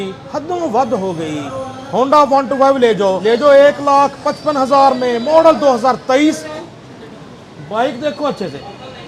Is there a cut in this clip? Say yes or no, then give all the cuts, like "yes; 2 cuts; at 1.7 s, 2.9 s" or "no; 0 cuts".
yes; 2 cuts; at 3.2 s, 6.5 s